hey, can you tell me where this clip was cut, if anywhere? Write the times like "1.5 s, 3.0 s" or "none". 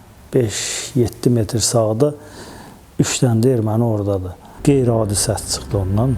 4.6 s